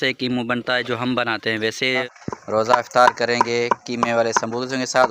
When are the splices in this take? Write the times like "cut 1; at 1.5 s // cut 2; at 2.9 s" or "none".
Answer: cut 1; at 2.0 s